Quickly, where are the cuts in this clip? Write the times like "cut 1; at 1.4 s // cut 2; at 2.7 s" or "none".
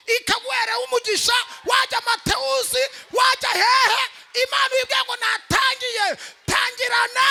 none